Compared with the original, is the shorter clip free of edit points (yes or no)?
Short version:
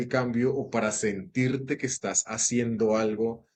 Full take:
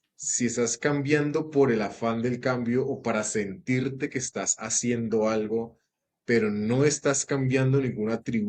yes